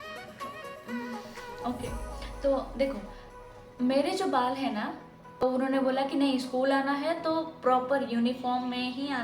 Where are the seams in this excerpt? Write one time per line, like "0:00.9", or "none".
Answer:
0:05.4